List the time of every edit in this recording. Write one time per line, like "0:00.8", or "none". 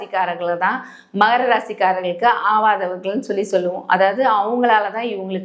none